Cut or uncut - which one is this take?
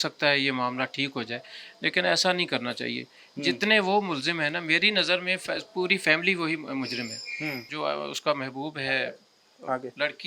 cut